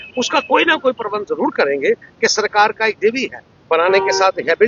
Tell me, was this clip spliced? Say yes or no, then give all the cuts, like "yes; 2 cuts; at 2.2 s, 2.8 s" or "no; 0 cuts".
no; 0 cuts